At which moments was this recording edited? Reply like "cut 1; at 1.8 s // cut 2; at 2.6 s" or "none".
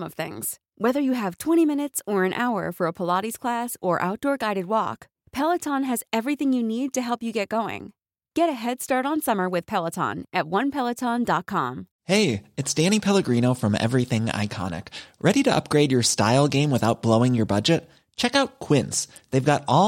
cut 1; at 11.9 s